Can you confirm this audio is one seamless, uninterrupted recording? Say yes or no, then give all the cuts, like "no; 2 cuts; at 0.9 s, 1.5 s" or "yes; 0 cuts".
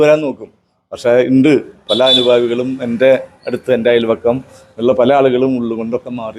yes; 0 cuts